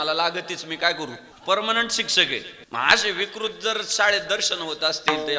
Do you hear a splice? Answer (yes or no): yes